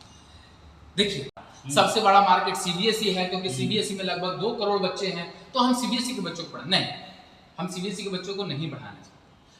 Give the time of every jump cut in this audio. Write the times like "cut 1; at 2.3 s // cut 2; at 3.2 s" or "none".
cut 1; at 1.3 s

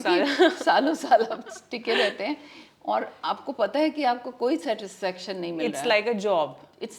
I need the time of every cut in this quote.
none

